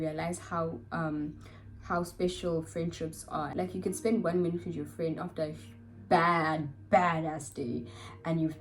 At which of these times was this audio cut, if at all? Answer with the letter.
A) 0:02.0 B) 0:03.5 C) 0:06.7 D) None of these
B